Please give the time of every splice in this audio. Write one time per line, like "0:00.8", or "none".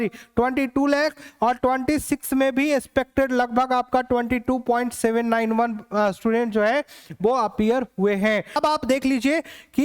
0:08.6